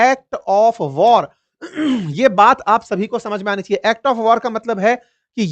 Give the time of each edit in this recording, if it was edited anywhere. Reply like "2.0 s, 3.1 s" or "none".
none